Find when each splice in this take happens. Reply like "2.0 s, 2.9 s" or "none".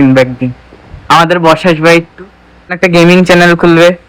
2.8 s